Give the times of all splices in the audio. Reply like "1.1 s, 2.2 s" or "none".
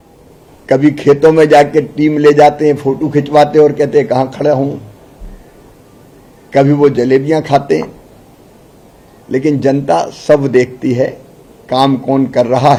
none